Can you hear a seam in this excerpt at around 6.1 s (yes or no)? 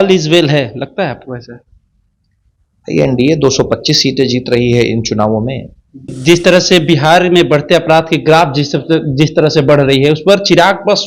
yes